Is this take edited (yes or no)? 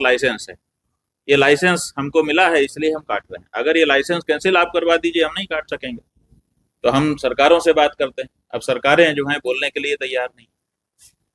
no